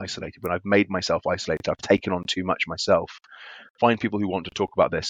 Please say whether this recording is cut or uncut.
uncut